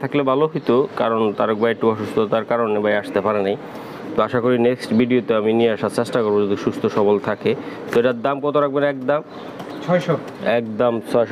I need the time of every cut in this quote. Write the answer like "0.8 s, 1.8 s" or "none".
none